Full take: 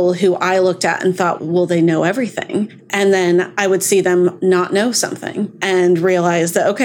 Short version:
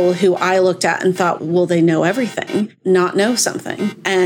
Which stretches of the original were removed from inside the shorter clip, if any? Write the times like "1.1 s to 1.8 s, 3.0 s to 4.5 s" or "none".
2.8 s to 4.4 s